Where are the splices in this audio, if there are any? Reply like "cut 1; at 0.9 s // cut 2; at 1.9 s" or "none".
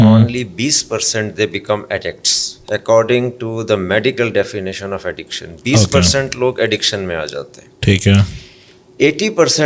none